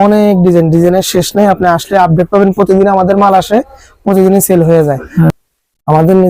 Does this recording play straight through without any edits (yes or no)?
no